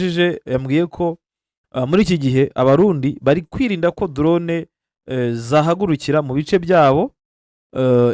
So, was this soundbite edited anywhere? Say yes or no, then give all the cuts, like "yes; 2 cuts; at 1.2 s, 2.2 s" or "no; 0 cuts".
no; 0 cuts